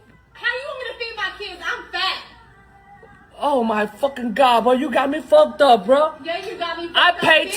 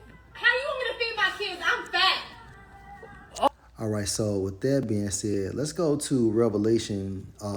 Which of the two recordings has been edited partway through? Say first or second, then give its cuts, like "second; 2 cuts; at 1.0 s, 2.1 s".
first; 1 cut; at 3.5 s